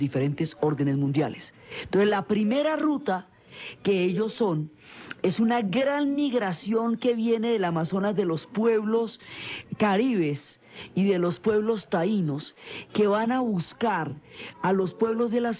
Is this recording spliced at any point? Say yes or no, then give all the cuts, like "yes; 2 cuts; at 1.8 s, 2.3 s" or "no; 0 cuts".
no; 0 cuts